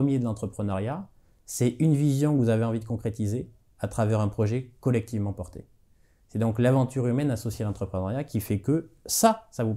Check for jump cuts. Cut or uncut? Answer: uncut